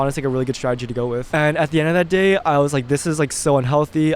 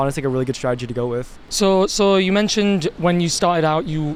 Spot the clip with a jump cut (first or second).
first